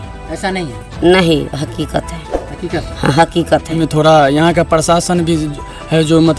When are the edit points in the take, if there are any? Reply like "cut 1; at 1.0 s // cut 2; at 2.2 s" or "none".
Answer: cut 1; at 3.8 s